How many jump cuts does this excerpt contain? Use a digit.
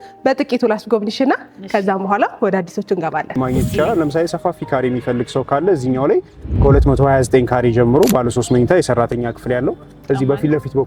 1